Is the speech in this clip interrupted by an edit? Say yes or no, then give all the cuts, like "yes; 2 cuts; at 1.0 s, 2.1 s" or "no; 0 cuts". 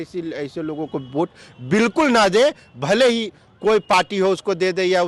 no; 0 cuts